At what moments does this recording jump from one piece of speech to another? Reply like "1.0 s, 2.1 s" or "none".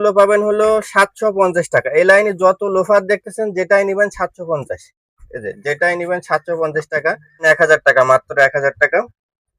7.4 s